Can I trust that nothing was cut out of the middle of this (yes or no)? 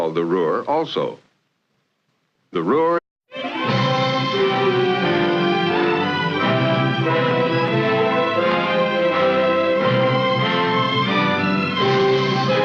yes